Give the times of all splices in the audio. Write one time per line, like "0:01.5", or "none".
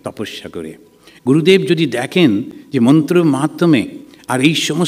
none